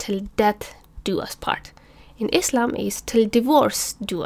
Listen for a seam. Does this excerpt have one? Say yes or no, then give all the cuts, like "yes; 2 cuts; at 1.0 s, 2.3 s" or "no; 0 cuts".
no; 0 cuts